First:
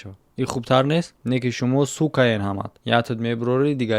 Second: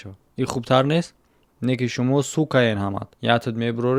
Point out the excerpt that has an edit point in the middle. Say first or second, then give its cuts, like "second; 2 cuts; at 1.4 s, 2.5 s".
first; 1 cut; at 1.1 s